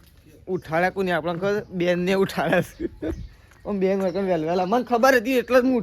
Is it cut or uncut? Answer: uncut